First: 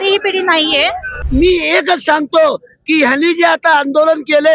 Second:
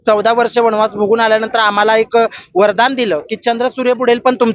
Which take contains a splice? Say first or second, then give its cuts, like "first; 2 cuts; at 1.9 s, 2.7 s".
first; 1 cut; at 1.2 s